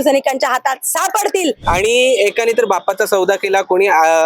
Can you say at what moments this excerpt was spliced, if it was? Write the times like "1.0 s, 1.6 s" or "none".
1.6 s

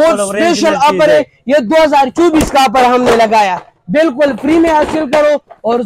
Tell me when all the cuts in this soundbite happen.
none

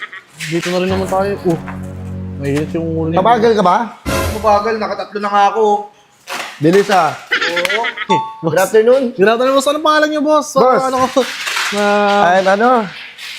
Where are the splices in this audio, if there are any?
8.1 s

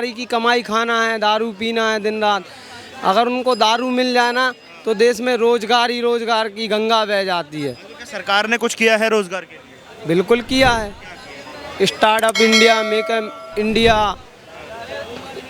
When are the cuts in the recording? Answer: none

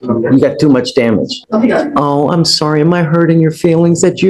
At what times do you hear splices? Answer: 1.4 s

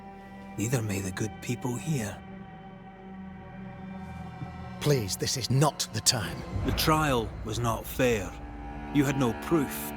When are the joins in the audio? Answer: 6.4 s

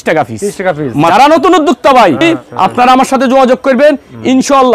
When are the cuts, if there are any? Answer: 1.1 s, 2.2 s

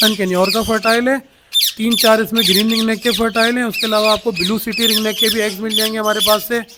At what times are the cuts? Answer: none

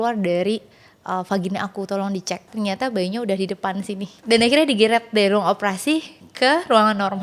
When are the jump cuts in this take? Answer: 2.5 s, 4.1 s

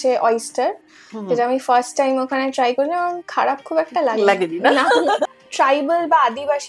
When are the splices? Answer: 5.4 s

